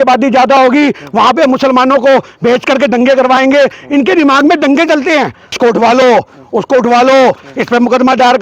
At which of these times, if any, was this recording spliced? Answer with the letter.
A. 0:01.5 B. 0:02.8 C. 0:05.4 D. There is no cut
C